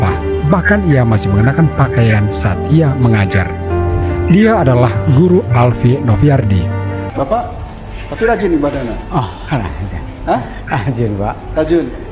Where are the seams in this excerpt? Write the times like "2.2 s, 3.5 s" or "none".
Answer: 7.0 s